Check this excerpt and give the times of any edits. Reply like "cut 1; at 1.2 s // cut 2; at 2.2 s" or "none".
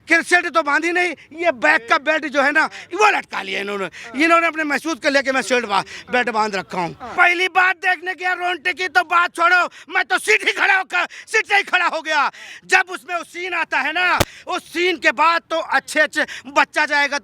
cut 1; at 7.1 s